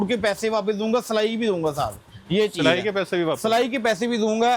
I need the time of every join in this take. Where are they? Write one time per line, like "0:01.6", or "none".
none